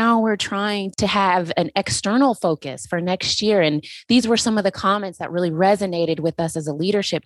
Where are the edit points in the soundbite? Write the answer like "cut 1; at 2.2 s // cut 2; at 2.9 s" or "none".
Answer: none